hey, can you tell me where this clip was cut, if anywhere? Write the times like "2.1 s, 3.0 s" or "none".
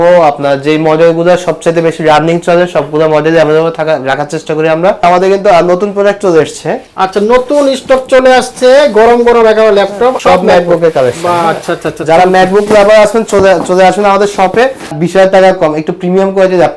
5.0 s, 6.9 s, 10.2 s, 15.0 s

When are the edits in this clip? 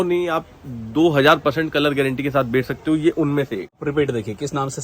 3.8 s

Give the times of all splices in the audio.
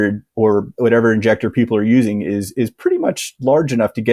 none

